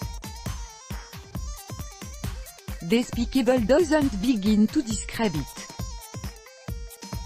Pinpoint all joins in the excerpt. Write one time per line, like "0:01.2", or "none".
0:00.9
0:03.1
0:05.5